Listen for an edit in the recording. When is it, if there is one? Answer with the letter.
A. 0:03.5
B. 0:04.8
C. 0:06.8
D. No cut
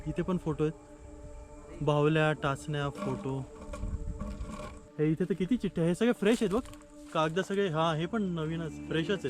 B